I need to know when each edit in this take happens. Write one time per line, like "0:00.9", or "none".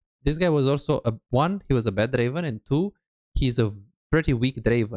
none